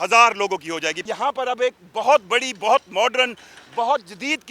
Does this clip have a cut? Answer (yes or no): yes